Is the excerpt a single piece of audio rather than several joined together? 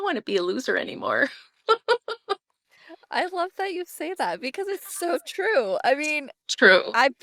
yes; 0 cuts

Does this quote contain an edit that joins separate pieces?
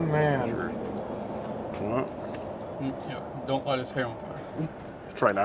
no; 0 cuts

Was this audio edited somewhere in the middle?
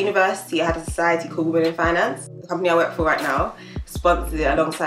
yes; 1 cut; at 2.3 s

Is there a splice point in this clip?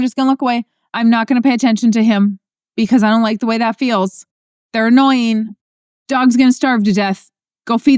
no; 0 cuts

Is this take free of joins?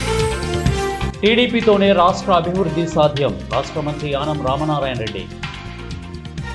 yes; 0 cuts

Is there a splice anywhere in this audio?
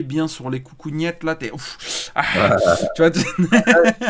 no; 0 cuts

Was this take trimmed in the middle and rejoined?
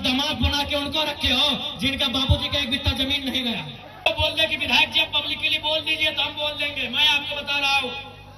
yes; 1 cut; at 4.1 s

